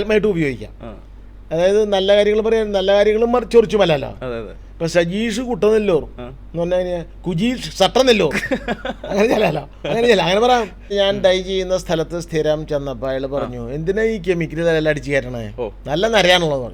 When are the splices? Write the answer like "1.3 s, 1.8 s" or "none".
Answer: 10.9 s